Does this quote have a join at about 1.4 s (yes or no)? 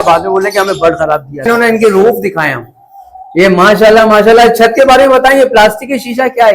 yes